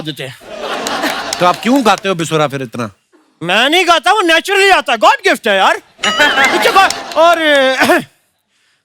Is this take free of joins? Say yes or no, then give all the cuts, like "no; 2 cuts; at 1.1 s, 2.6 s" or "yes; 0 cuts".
yes; 0 cuts